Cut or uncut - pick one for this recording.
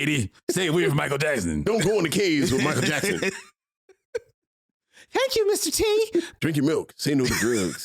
cut